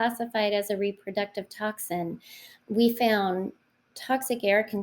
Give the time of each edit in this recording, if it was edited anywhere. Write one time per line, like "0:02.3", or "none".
0:02.7